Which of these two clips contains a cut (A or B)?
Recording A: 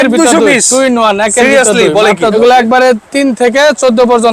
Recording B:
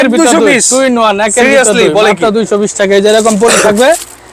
A